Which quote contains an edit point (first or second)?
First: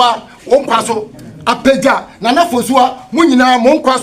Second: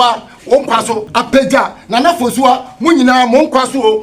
second